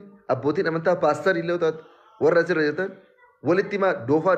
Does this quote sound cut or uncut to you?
uncut